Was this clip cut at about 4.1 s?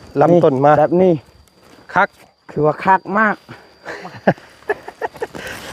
no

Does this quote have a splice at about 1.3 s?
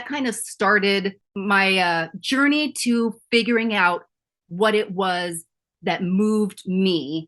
yes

